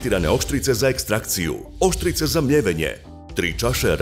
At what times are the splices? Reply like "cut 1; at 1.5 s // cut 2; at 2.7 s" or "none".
cut 1; at 1.6 s